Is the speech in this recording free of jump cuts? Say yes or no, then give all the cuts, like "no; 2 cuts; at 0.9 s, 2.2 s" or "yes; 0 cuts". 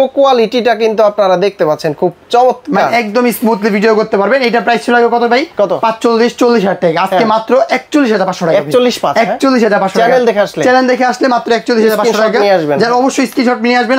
yes; 0 cuts